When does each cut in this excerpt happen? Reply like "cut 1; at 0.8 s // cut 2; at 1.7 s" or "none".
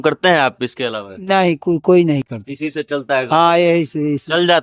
none